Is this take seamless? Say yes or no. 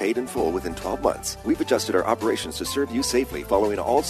no